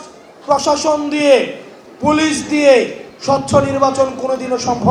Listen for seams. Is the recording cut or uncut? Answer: uncut